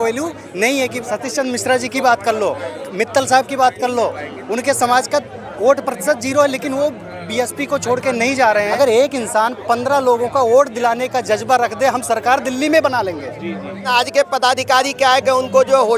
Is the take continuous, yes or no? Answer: no